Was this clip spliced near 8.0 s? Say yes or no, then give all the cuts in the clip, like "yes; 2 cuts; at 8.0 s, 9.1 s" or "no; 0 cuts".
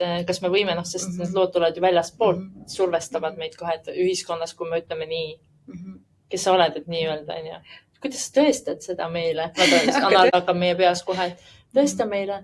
no; 1 cut; at 10.3 s